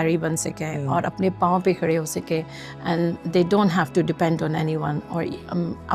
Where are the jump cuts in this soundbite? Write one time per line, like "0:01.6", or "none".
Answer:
none